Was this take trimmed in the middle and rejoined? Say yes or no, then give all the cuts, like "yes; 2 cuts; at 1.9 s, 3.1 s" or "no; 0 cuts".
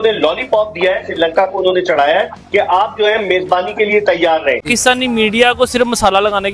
yes; 1 cut; at 4.6 s